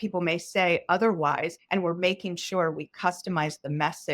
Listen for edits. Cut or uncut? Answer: cut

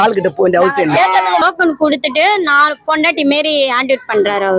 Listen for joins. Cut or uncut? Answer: cut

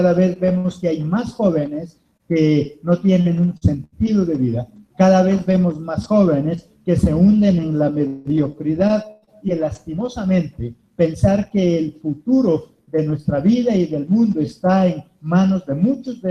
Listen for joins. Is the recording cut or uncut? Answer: uncut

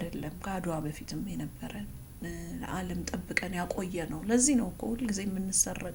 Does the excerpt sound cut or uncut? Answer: uncut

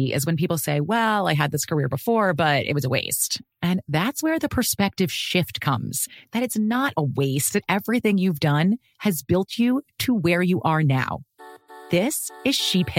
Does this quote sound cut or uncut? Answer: uncut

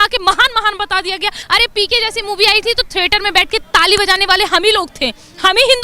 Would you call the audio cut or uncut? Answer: cut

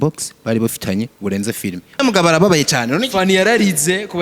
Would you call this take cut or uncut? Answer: cut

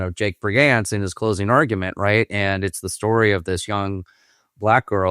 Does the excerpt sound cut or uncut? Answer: uncut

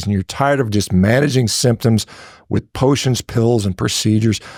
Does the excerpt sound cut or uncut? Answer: uncut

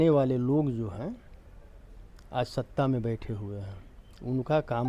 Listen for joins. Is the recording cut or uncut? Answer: uncut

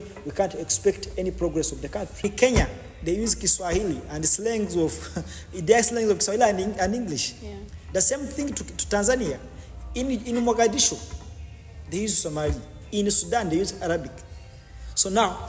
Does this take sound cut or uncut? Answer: cut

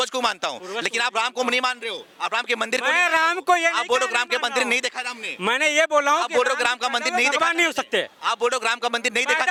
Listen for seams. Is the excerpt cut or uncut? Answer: uncut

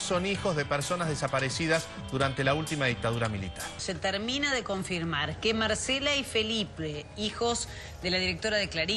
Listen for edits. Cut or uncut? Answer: uncut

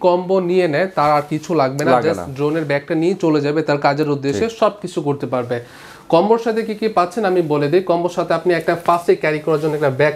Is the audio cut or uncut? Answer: uncut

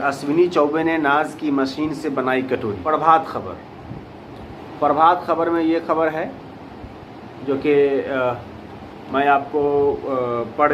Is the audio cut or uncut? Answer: cut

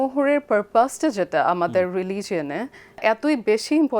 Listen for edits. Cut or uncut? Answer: cut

